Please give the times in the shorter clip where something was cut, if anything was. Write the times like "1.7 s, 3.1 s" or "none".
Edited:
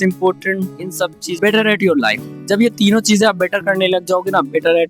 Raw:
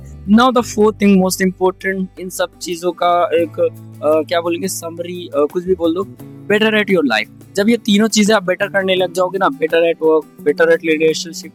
1.4 s

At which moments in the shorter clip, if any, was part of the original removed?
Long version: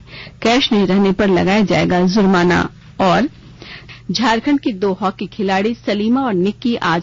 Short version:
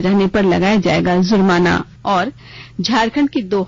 2.1 s

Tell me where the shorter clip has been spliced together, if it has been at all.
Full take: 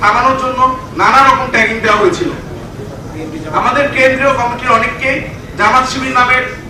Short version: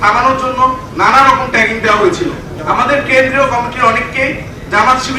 2.5 s

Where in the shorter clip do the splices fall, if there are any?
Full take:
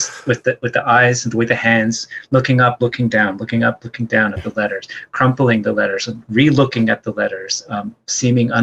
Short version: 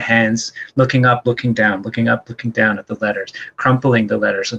none

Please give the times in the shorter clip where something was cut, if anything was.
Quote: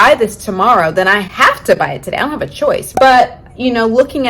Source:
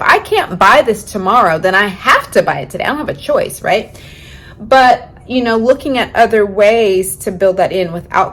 2.9 s

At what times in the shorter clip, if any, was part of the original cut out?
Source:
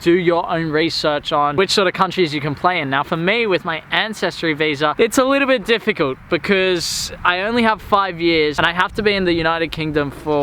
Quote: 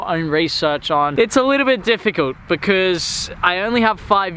1.1 s

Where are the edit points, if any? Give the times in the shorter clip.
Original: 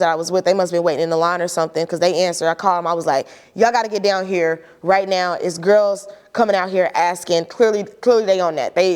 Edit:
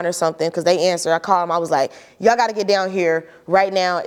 none

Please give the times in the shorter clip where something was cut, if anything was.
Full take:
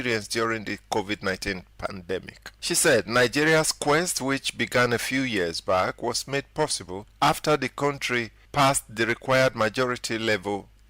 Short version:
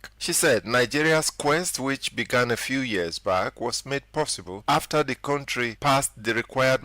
4.5 s, 5.7 s

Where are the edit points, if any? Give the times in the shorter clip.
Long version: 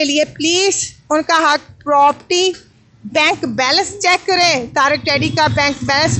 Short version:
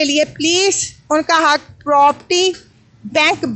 none

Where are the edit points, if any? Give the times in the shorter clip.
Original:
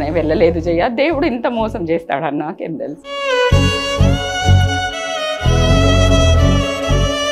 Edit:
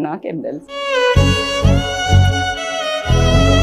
none

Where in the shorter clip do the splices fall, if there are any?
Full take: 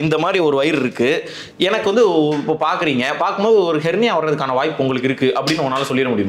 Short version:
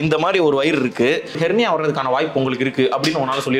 1.4 s

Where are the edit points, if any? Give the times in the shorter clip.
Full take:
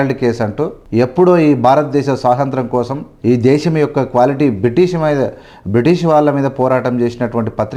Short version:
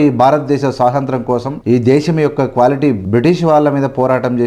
1.5 s, 3.0 s

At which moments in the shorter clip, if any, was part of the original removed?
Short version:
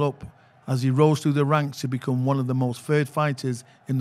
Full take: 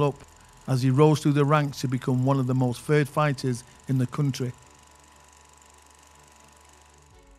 none

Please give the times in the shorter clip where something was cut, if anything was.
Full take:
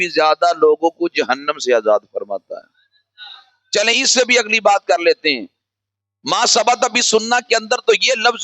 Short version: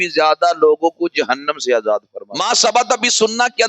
2.2 s

